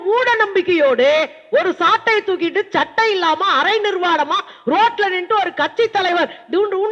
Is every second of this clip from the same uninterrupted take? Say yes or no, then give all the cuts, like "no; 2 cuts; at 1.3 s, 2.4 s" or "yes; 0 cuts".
yes; 0 cuts